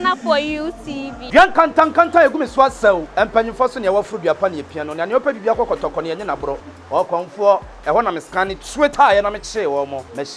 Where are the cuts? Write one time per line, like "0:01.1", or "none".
none